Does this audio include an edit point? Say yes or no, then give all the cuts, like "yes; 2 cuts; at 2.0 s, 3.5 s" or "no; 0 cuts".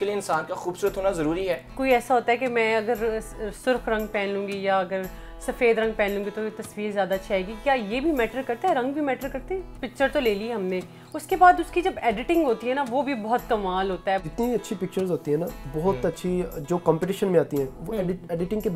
yes; 3 cuts; at 1.7 s, 9.7 s, 14.3 s